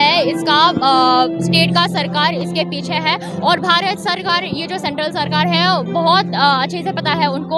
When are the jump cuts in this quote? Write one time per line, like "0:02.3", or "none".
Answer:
none